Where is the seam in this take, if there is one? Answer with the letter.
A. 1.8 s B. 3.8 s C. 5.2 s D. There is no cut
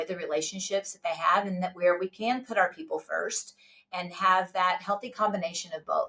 D